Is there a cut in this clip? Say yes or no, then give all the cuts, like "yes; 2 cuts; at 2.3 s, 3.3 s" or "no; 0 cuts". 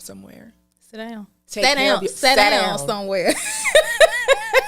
no; 0 cuts